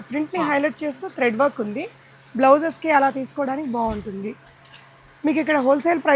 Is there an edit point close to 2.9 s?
no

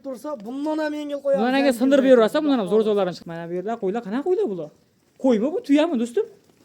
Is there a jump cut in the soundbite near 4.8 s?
no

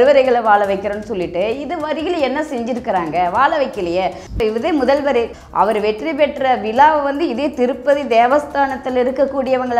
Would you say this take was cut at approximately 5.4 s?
yes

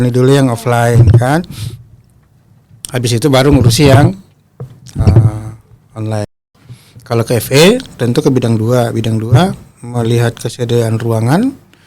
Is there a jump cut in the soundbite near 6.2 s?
yes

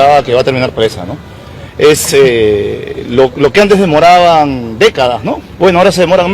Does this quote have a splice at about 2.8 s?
no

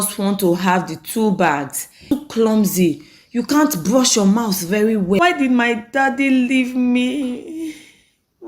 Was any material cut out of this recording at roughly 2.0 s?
yes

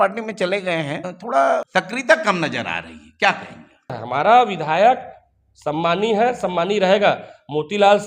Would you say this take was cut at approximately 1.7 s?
yes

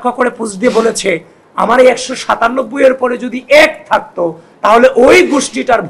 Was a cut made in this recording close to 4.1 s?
no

